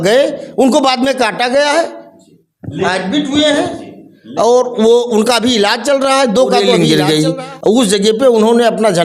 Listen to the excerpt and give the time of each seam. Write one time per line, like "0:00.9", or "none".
0:06.7